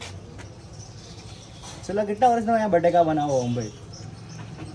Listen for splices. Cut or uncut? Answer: uncut